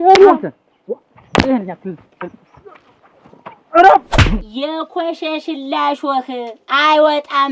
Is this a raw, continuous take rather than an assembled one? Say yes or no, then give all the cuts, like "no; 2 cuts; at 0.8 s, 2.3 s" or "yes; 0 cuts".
no; 1 cut; at 4.3 s